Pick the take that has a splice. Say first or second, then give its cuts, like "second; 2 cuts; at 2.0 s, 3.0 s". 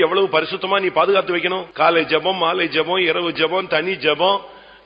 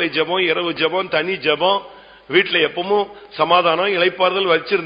first; 1 cut; at 1.6 s